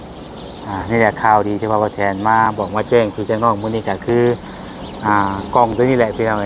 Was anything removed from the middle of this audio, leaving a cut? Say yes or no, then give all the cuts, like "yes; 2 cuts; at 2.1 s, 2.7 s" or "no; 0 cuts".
no; 0 cuts